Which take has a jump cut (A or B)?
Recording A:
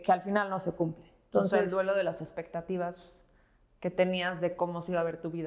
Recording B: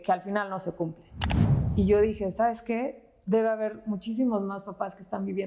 B